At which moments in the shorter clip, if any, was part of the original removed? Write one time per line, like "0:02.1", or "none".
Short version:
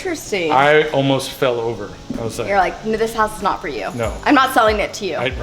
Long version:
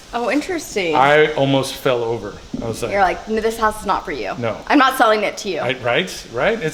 none